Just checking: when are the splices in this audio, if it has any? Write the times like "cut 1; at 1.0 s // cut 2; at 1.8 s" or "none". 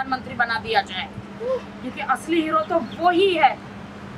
none